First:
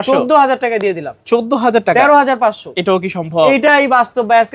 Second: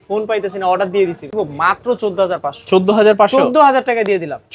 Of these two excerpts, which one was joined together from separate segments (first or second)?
second